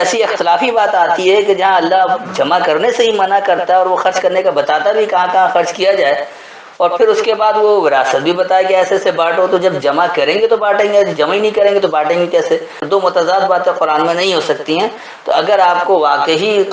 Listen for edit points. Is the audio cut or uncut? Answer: cut